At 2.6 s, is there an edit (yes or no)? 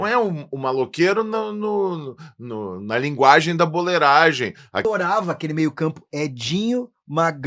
no